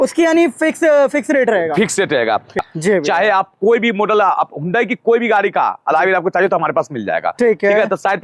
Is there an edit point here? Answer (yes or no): yes